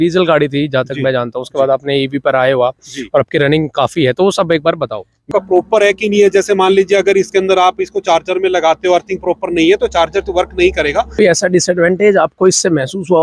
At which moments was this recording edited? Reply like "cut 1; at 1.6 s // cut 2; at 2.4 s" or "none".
cut 1; at 5.3 s // cut 2; at 11.1 s